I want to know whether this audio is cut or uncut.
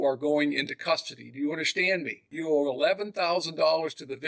cut